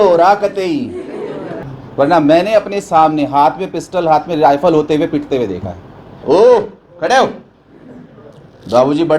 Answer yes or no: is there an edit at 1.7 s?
yes